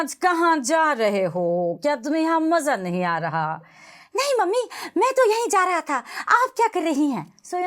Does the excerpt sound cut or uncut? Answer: uncut